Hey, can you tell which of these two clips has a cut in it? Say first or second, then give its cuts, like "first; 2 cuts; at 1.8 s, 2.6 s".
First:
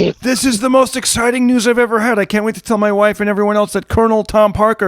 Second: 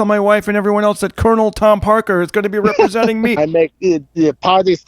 second; 1 cut; at 3.4 s